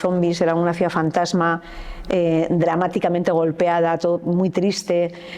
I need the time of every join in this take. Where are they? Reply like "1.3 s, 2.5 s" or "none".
none